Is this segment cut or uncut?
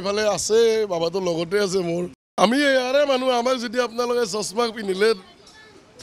cut